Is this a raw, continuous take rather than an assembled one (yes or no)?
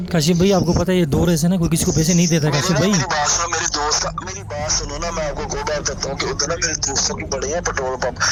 yes